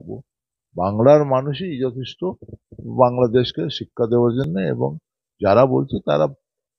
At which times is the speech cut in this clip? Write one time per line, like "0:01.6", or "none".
none